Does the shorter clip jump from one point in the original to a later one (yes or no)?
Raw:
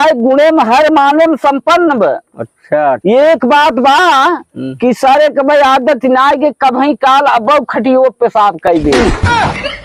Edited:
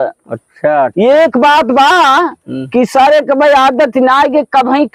no